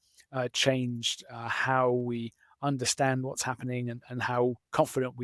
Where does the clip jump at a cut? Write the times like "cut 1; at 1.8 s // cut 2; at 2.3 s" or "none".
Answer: none